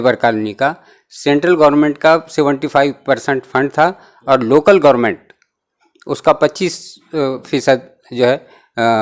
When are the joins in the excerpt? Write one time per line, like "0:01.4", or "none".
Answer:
none